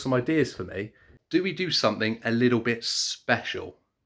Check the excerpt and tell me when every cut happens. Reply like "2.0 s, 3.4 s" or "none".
1.1 s